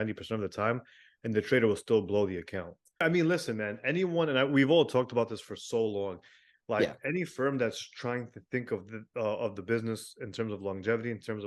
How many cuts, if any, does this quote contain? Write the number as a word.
one